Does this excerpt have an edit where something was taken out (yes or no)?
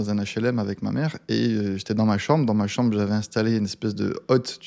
no